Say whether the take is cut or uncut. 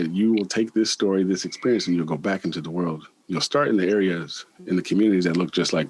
uncut